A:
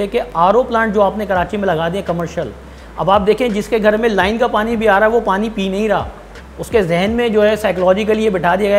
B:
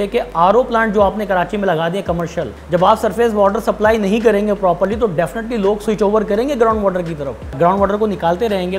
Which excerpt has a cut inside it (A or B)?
B